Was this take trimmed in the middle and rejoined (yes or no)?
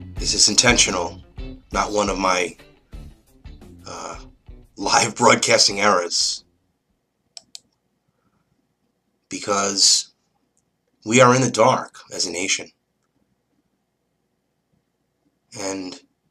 no